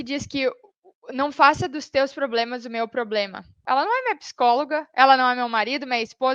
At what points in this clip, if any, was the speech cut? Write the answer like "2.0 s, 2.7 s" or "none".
3.6 s

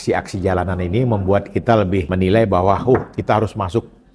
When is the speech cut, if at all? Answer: 2.1 s

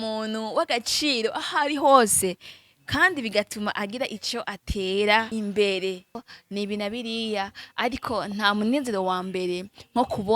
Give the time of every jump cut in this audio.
5.3 s, 6.2 s

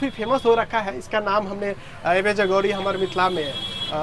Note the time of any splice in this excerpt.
none

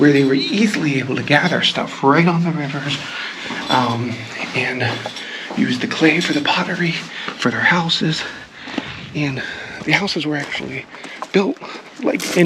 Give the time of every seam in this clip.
none

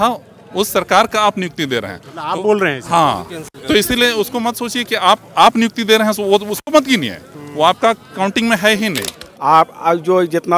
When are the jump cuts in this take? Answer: 9.3 s

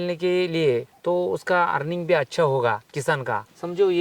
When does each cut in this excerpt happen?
0.9 s, 3.2 s

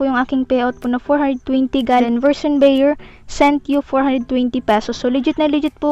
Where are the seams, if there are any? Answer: 2.0 s

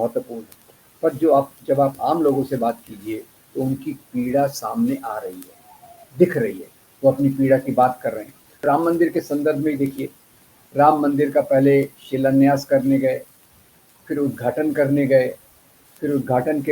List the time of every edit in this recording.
8.6 s

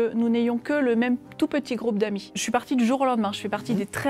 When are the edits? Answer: 2.3 s

